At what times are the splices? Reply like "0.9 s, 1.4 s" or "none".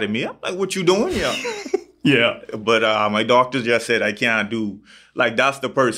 none